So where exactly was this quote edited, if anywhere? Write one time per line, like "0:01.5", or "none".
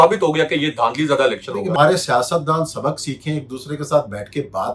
0:01.8